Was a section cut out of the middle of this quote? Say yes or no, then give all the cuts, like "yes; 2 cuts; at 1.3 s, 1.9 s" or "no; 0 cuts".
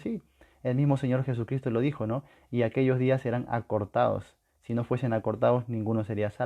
no; 0 cuts